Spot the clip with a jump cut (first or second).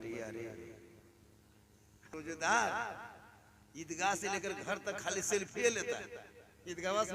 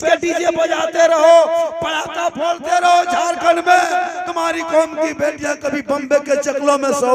first